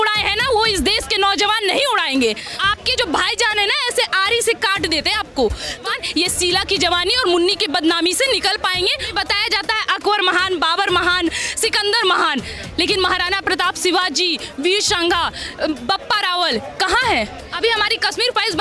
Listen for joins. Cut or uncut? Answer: cut